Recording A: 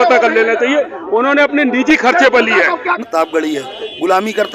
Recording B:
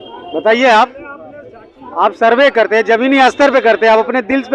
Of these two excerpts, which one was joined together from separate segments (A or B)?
A